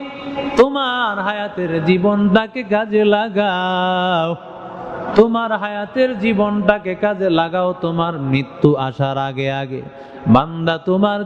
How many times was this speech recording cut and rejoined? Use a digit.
0